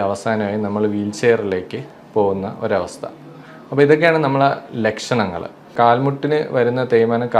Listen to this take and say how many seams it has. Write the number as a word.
one